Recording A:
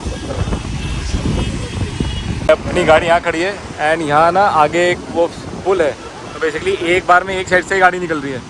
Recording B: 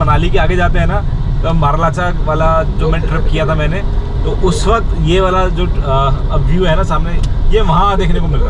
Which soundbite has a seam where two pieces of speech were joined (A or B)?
A